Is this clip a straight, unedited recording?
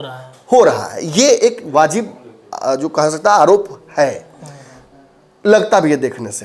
yes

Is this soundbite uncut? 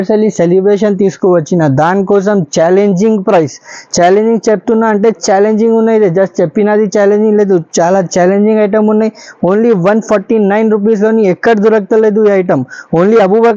yes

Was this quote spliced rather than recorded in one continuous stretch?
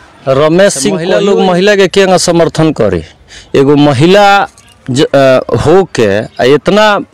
yes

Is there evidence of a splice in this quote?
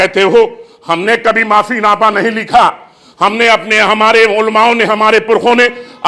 no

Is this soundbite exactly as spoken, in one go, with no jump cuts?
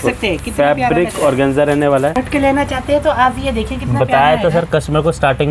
no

